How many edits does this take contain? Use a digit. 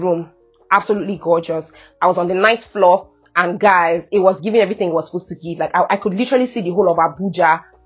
0